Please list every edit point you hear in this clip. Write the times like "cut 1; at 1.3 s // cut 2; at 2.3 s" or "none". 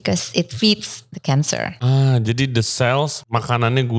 cut 1; at 1.8 s // cut 2; at 3.2 s